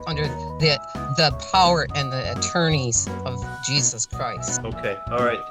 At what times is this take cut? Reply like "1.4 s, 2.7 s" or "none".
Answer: none